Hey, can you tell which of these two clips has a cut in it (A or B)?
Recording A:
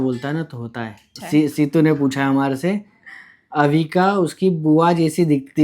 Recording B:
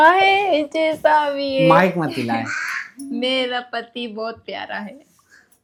A